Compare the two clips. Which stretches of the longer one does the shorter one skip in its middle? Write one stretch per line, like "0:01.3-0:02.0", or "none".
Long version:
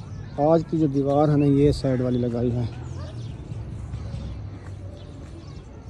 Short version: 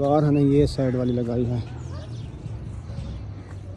0:03.9-0:04.0